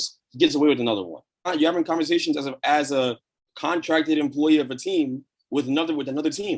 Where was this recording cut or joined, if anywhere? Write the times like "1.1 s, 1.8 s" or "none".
1.4 s

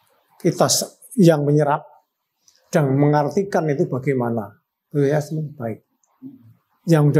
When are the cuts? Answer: none

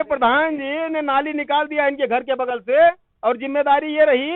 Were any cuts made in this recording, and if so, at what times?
none

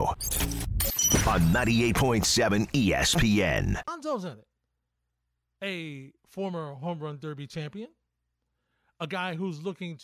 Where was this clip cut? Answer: 3.9 s

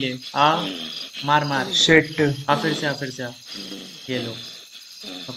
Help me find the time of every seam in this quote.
none

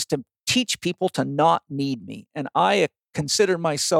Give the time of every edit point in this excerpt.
none

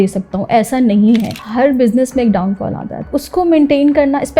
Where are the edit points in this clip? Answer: 1.3 s

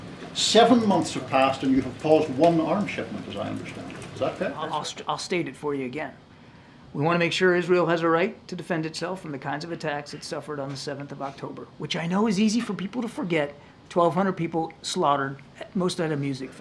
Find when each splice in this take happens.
4.7 s

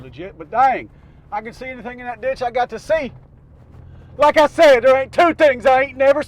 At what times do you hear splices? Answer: none

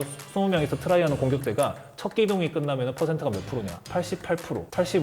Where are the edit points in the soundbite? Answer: none

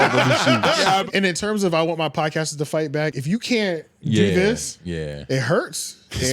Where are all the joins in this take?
1.0 s, 3.2 s, 4.8 s

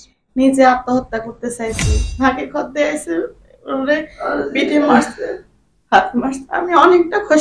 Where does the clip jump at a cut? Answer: 2.0 s

